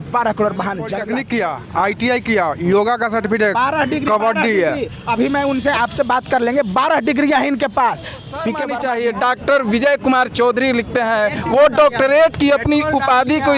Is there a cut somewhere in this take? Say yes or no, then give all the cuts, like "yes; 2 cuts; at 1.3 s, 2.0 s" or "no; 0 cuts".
yes; 2 cuts; at 1.0 s, 8.6 s